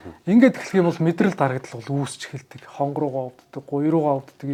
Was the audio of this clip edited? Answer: no; 0 cuts

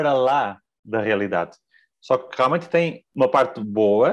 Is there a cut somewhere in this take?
yes; 1 cut; at 3.0 s

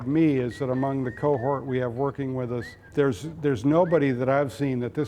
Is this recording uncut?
no; 1 cut; at 2.8 s

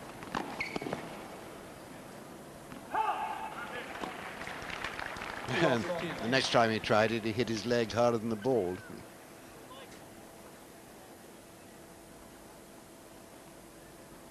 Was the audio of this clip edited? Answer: yes; 1 cut; at 6.3 s

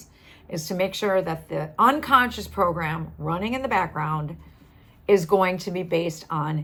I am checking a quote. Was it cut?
no; 0 cuts

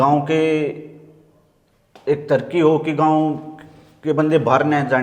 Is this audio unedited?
yes; 0 cuts

